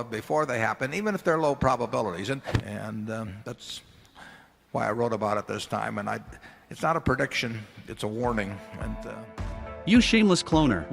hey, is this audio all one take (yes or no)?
no